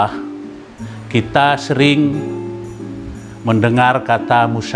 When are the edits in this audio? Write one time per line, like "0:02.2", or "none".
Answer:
none